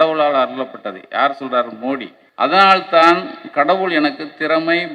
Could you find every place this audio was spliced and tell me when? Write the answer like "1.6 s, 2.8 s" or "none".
2.2 s